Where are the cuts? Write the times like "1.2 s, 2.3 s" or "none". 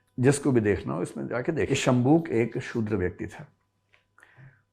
1.7 s